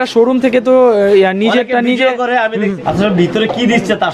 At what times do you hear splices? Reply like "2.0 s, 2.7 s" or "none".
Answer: 2.8 s